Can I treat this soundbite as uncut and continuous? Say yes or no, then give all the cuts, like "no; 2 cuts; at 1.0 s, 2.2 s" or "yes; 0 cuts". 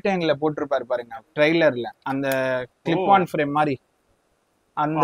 yes; 0 cuts